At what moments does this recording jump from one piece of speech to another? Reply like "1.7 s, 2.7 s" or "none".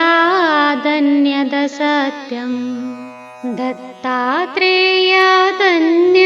3.3 s